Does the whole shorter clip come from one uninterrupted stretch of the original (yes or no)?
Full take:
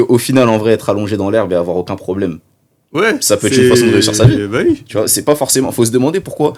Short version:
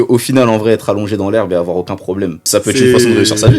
no